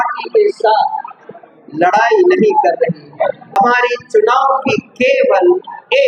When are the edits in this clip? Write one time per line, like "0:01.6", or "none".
0:03.6